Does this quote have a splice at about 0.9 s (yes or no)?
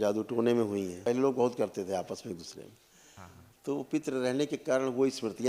yes